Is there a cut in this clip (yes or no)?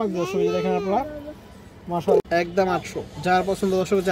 yes